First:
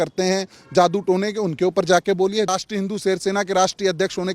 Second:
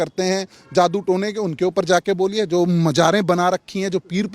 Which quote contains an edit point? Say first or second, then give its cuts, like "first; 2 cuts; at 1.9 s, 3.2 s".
first; 1 cut; at 2.5 s